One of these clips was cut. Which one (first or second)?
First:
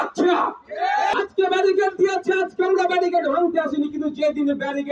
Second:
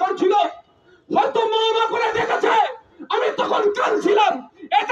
first